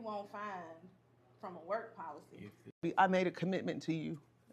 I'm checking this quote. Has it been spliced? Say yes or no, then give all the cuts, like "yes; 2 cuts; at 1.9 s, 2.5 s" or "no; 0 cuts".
yes; 1 cut; at 2.8 s